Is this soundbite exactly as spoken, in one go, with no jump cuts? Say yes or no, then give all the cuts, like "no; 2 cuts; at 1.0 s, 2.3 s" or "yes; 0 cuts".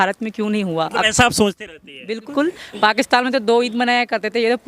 no; 1 cut; at 2.3 s